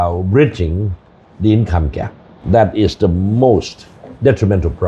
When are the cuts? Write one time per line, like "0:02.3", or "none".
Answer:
0:02.3